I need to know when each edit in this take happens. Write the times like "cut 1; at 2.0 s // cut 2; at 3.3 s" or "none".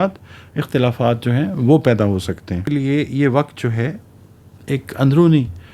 cut 1; at 2.6 s